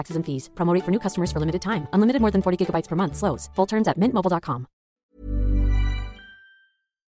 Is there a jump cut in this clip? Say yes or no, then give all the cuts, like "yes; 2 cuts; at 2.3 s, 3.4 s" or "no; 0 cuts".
no; 0 cuts